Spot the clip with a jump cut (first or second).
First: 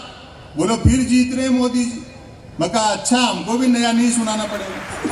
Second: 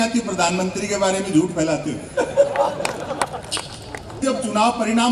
second